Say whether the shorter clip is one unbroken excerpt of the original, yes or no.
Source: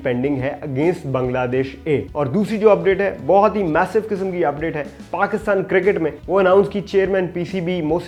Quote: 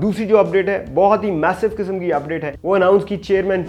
no